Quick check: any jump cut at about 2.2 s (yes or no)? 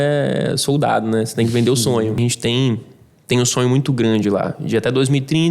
yes